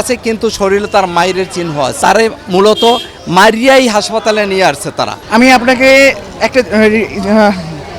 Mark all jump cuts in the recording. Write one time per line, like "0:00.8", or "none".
0:01.9
0:05.2